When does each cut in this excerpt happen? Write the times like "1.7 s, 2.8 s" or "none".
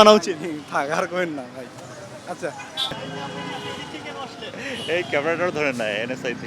none